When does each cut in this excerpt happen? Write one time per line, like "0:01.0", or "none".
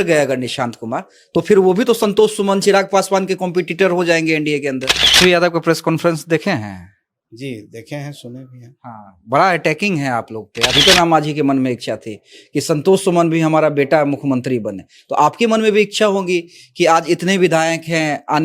0:05.2
0:10.7